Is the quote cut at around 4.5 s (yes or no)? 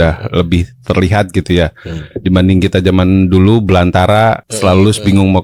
yes